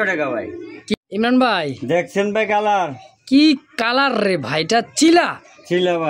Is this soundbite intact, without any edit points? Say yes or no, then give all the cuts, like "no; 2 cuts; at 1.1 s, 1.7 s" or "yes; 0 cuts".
no; 1 cut; at 0.9 s